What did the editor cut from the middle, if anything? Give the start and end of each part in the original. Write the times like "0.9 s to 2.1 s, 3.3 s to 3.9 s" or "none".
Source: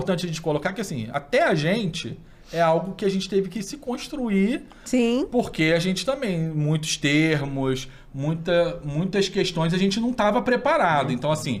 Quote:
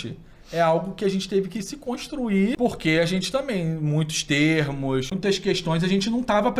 4.6 s to 5.3 s, 7.9 s to 9.0 s

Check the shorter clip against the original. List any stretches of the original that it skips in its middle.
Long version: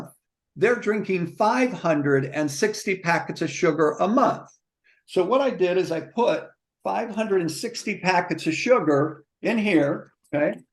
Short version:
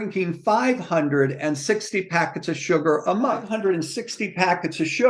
4.4 s to 7.1 s

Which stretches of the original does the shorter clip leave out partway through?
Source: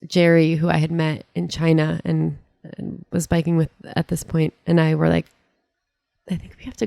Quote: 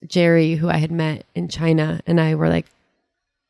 2.0 s to 4.6 s

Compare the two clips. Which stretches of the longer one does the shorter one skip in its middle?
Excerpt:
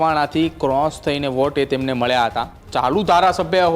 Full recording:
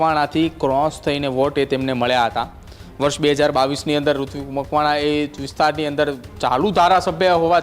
2.6 s to 6.3 s

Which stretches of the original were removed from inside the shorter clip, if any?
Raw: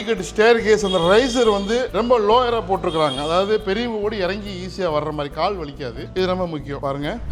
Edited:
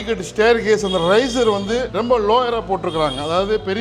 none

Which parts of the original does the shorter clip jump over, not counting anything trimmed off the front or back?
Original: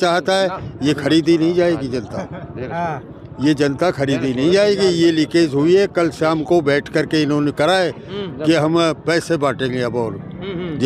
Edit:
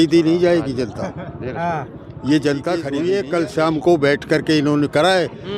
4.1 s to 5.6 s

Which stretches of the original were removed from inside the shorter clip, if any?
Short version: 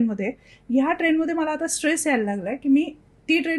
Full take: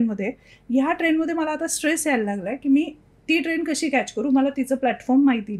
none

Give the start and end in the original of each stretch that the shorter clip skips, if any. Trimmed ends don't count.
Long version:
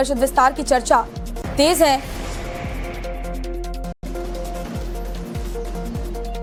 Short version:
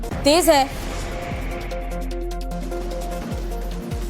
3.9 s to 4.1 s

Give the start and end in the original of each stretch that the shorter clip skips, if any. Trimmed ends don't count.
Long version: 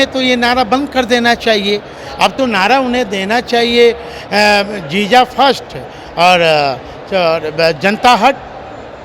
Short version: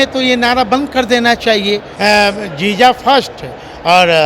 1.9 s to 4.2 s

